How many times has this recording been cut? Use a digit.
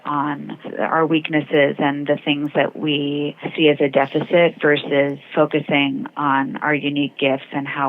2